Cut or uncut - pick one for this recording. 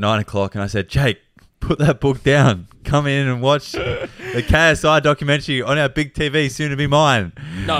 uncut